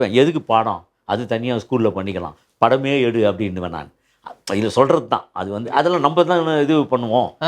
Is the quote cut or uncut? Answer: uncut